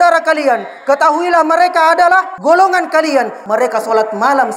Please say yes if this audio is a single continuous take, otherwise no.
no